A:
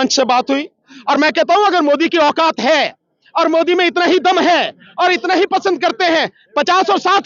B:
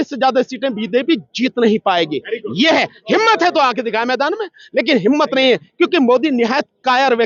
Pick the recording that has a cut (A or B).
A